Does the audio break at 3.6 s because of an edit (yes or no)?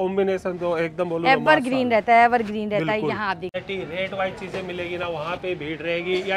yes